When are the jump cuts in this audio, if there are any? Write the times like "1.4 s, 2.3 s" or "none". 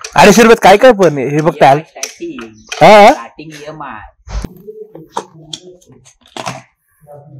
4.4 s